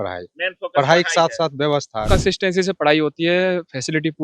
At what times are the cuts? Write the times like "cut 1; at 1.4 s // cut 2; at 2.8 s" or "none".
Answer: cut 1; at 2.1 s